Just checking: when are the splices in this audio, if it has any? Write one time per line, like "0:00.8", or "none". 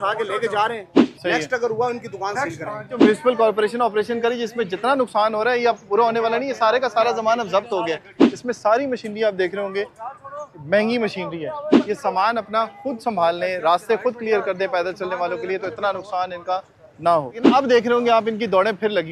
0:00.9
0:03.0
0:08.3
0:11.7
0:17.5